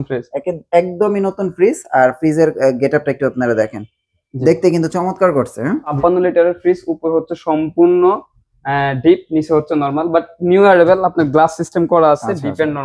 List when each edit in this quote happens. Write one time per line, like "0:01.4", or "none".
0:06.0